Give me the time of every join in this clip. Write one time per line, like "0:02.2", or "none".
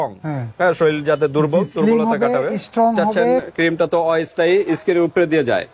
0:03.5